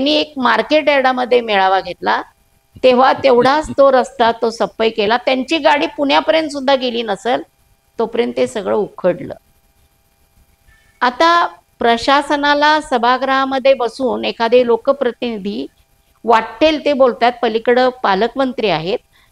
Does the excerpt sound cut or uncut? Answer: uncut